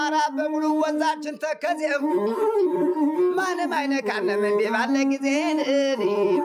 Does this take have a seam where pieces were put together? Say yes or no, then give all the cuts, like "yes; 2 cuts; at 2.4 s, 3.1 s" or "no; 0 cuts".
no; 0 cuts